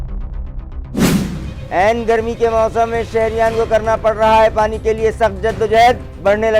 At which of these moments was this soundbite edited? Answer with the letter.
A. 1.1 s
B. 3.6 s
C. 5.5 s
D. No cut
A